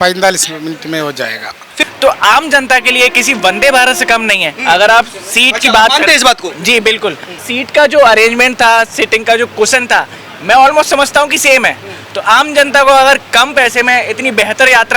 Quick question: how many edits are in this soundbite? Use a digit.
2